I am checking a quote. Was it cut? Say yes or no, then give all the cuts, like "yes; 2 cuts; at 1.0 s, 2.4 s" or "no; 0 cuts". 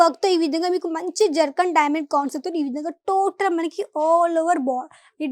no; 0 cuts